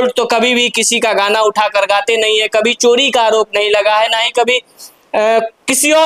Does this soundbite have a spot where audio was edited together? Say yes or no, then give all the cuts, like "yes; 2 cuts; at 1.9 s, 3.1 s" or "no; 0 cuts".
no; 0 cuts